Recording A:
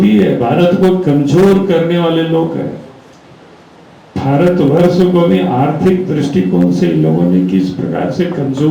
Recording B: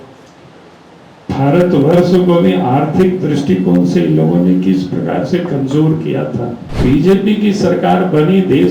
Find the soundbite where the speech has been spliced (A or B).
B